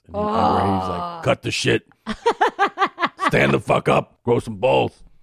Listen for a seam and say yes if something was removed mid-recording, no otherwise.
yes